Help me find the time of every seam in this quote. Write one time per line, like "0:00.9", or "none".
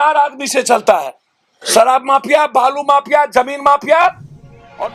none

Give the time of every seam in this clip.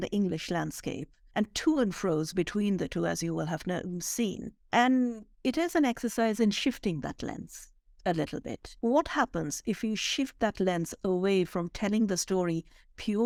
none

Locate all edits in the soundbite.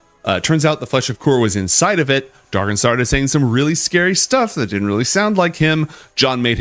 none

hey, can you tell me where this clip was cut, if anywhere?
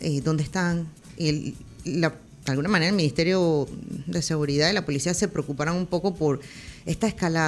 0:01.0
0:02.3

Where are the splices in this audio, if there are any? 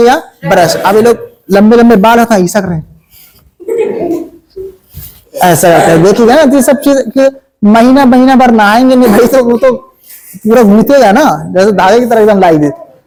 none

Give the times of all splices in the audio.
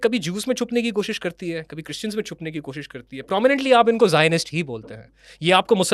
none

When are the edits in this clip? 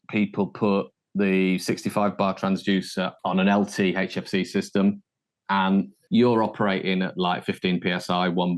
0:03.1
0:06.0

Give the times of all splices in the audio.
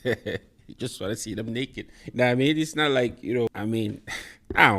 0:03.5

